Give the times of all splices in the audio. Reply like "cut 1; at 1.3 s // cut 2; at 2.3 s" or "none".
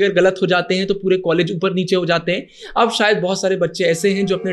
none